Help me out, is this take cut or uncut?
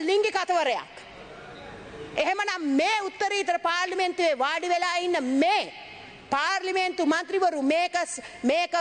uncut